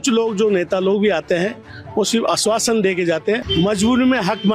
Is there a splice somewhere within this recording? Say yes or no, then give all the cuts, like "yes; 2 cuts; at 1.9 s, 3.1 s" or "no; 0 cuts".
yes; 1 cut; at 3.5 s